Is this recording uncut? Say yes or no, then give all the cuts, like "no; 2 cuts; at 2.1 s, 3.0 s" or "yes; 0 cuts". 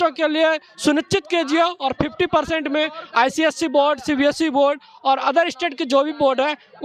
yes; 0 cuts